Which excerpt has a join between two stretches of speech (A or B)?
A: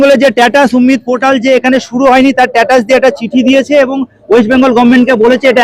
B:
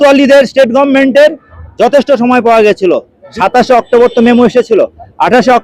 B